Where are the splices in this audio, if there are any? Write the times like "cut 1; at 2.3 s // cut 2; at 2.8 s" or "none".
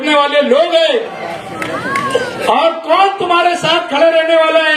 cut 1; at 1.2 s